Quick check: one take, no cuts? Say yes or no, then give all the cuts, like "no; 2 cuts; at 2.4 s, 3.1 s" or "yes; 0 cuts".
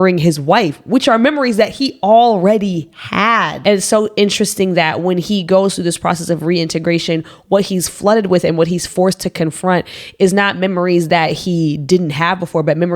no; 1 cut; at 3.6 s